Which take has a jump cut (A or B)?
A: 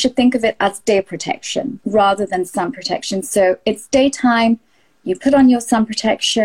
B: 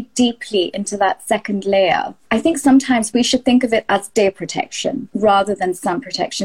B